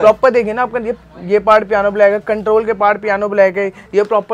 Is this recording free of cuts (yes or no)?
yes